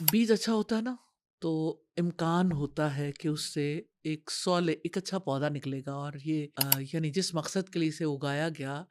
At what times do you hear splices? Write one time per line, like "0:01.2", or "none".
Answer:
0:06.5